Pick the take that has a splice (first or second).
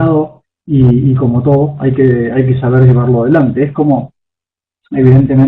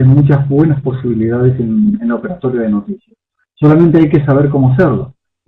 first